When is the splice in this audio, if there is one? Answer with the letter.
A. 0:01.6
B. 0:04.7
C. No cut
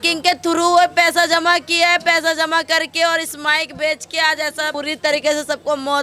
B